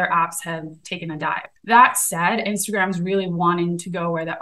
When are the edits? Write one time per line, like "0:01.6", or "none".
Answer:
0:01.5